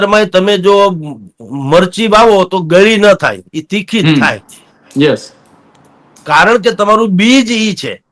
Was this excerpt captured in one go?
yes; 0 cuts

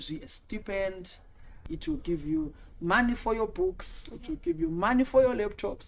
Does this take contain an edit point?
yes; 1 cut; at 1.7 s

